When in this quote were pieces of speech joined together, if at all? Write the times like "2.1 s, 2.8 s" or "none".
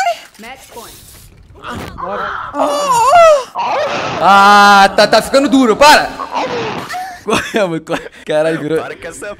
6.2 s